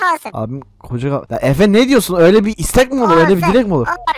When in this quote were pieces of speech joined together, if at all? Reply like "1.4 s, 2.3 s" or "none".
1.3 s